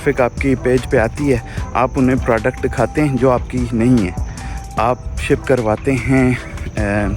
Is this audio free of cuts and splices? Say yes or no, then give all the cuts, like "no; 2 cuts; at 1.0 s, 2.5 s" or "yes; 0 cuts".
yes; 0 cuts